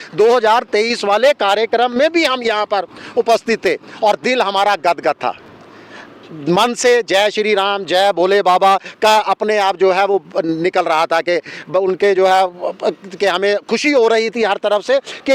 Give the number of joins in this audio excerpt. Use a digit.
0